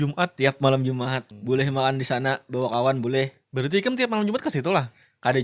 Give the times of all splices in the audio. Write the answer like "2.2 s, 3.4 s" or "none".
1.3 s